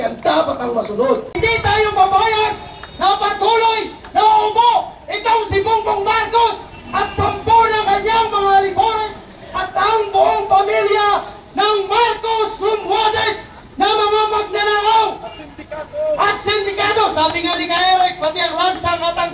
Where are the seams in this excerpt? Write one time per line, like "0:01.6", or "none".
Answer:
0:01.4